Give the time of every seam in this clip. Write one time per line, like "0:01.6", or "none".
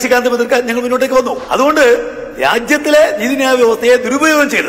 0:01.4